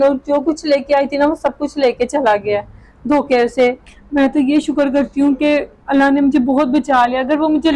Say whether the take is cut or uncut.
cut